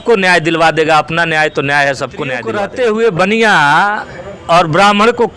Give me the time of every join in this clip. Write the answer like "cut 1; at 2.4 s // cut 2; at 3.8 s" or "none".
cut 1; at 2.5 s

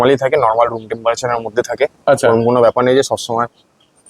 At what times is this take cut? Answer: none

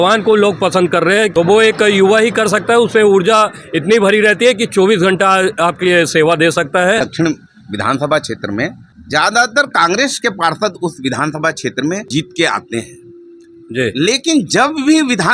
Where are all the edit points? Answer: cut 1; at 1.3 s // cut 2; at 7.1 s // cut 3; at 8.9 s // cut 4; at 12.1 s

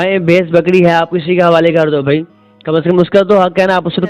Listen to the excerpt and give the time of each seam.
none

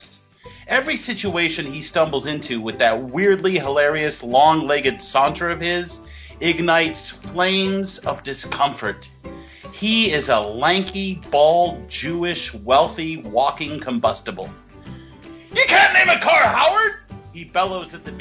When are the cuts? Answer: none

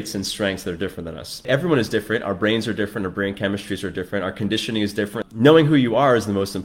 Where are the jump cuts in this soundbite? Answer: cut 1; at 1.5 s // cut 2; at 5.2 s

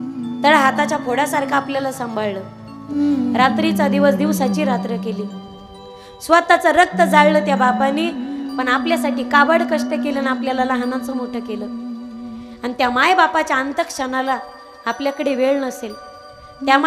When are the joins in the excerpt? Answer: cut 1; at 2.9 s

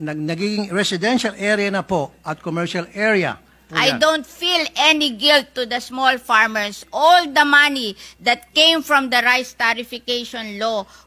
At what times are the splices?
cut 1; at 3.6 s

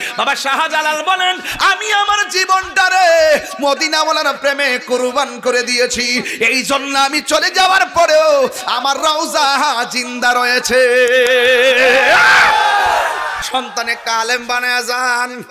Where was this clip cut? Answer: cut 1; at 13.4 s

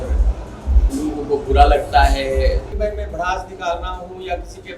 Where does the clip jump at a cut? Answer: cut 1; at 2.7 s

